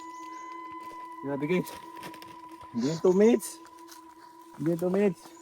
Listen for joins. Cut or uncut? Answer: cut